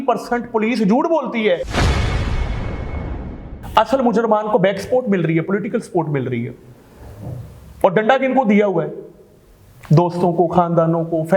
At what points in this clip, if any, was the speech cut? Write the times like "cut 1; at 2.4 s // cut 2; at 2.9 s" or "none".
cut 1; at 3.5 s